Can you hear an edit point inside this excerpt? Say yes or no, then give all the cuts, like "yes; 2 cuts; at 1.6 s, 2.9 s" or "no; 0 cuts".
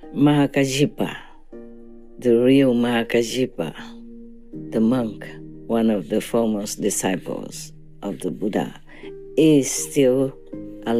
no; 0 cuts